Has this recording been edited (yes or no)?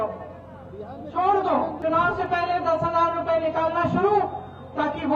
yes